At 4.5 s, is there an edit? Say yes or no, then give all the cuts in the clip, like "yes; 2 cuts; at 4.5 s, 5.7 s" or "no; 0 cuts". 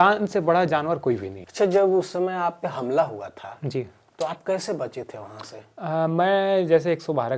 no; 1 cut; at 1.4 s